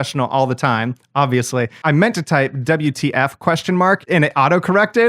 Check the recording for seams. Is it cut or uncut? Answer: cut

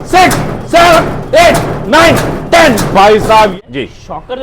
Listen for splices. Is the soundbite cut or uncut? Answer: cut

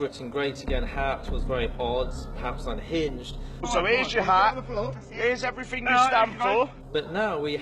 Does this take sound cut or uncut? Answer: cut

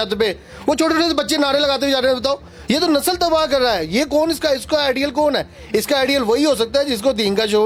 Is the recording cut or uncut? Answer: uncut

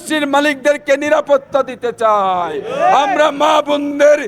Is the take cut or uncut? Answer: uncut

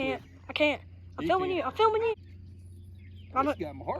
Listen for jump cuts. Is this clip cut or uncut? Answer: cut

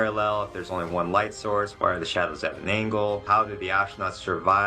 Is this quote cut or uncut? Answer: cut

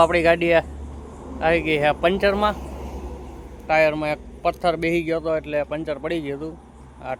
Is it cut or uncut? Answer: uncut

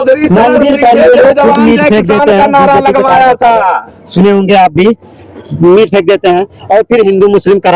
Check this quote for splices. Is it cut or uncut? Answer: uncut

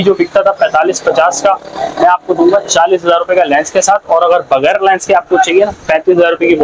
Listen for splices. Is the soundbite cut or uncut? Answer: uncut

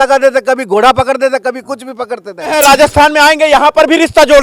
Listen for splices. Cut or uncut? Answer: cut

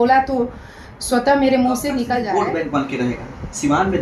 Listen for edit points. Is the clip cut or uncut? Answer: cut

